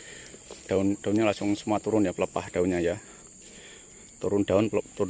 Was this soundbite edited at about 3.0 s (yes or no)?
no